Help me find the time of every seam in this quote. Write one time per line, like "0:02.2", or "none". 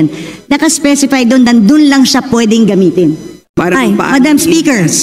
0:03.5